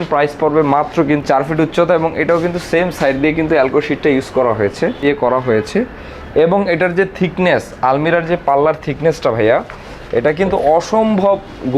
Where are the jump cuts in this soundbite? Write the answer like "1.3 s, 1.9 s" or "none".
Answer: 1.2 s, 5.0 s